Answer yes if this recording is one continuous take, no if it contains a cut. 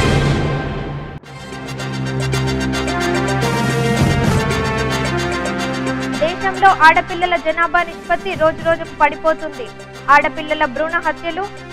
no